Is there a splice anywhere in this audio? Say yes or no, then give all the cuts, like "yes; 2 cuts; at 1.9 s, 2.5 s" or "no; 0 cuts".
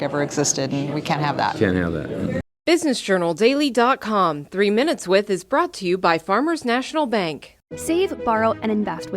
yes; 1 cut; at 2.5 s